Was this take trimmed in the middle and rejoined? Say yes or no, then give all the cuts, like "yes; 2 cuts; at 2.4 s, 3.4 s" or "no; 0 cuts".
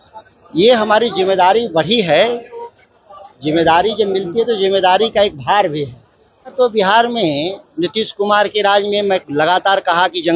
yes; 1 cut; at 6.5 s